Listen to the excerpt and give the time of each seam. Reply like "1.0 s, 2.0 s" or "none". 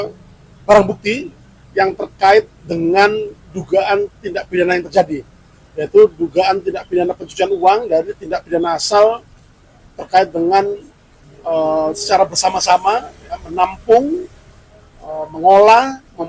none